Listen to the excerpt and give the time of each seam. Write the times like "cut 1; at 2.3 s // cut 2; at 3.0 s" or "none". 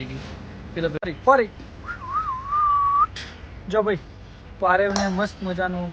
cut 1; at 1.0 s

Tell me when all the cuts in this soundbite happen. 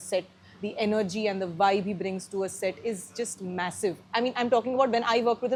none

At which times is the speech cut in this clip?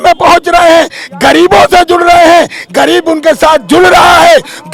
none

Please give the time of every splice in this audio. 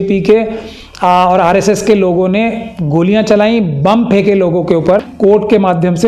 cut 1; at 5.1 s

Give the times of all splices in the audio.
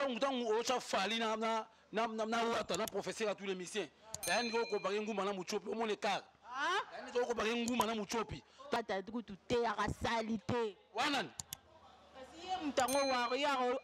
cut 1; at 8.8 s

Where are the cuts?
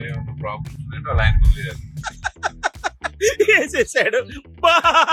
none

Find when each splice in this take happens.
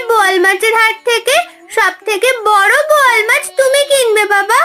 none

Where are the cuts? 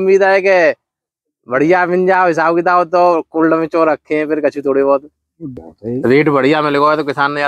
cut 1; at 5.6 s

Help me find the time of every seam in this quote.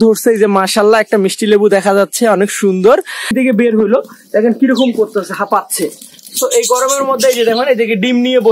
cut 1; at 3.3 s

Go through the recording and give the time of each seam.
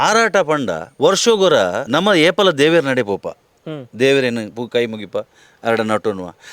cut 1; at 0.8 s // cut 2; at 1.8 s

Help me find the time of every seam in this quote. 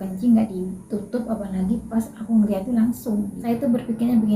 cut 1; at 3.3 s

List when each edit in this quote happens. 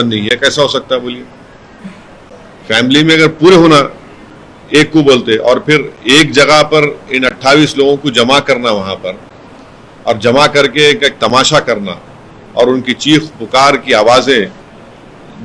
none

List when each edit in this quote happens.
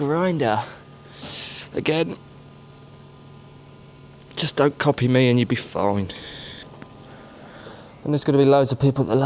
cut 1; at 6.6 s

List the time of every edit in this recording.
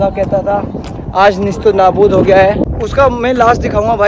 cut 1; at 2.6 s

